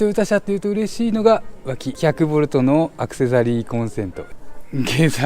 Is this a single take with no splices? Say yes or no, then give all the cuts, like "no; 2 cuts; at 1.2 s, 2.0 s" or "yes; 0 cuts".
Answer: no; 2 cuts; at 1.9 s, 4.3 s